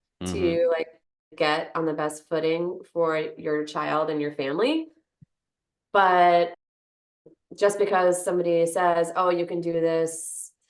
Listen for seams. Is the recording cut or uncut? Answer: uncut